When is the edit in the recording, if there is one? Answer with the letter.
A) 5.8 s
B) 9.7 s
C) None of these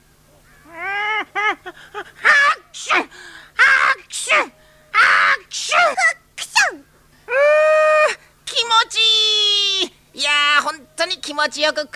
C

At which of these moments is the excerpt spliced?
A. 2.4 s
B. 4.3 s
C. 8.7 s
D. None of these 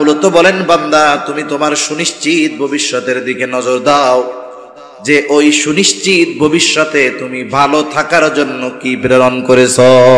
D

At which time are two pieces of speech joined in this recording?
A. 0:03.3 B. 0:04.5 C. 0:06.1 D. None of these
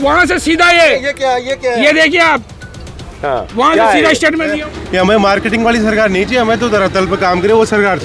B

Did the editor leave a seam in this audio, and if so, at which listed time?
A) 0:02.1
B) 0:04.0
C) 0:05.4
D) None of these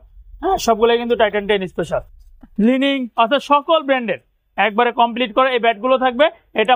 A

